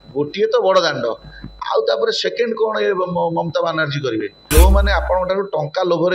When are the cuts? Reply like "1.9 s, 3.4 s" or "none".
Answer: 4.5 s